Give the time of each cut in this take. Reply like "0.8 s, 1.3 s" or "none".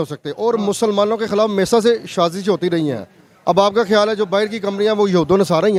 none

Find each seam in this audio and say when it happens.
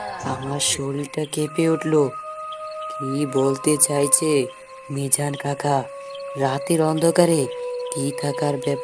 none

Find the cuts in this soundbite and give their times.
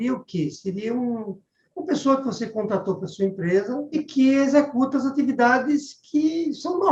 3.9 s

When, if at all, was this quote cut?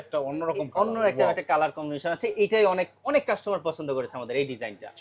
none

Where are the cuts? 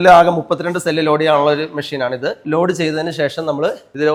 none

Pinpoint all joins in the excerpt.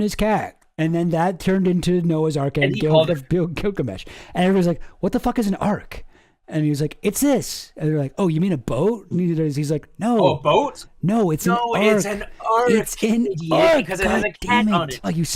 none

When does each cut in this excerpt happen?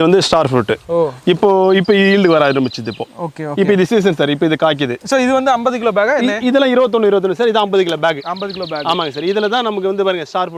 none

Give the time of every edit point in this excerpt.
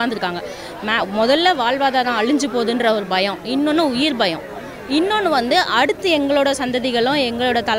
none

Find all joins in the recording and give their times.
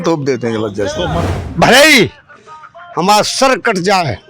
1.2 s

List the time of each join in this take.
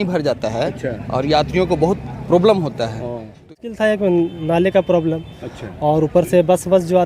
3.5 s

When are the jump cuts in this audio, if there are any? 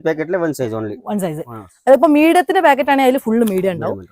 none

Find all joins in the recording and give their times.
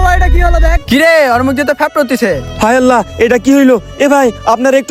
none

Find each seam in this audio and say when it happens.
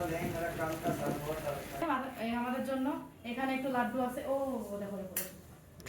1.8 s

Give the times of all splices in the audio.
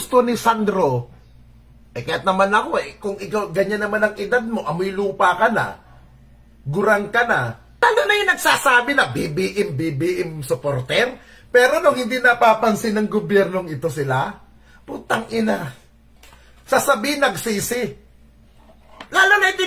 7.8 s

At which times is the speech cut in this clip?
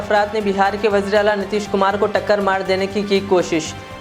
none

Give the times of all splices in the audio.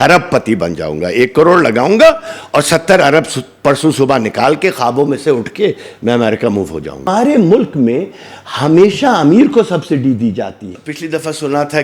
7.1 s, 10.7 s

